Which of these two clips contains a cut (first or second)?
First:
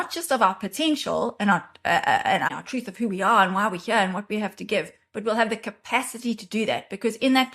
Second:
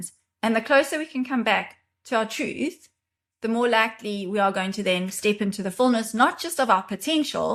first